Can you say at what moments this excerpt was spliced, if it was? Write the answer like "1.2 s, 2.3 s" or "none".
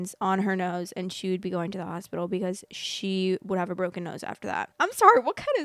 4.7 s